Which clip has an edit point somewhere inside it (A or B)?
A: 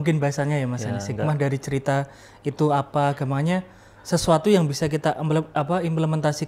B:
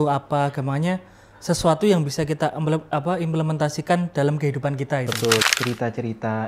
B